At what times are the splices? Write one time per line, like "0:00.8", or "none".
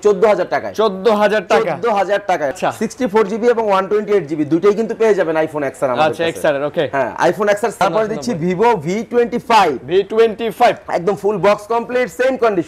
0:02.5
0:07.8